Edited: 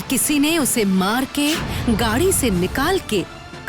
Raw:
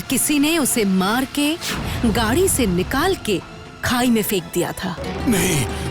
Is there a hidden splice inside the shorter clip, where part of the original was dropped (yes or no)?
yes